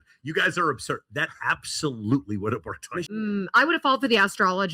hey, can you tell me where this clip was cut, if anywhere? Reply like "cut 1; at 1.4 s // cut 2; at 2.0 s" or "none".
cut 1; at 3.0 s